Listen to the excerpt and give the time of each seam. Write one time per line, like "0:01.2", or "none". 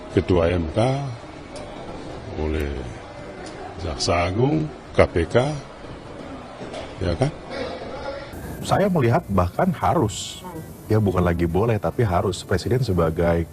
0:08.4